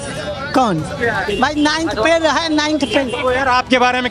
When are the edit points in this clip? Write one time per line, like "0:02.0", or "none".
none